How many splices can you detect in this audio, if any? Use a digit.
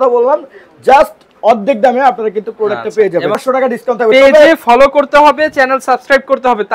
1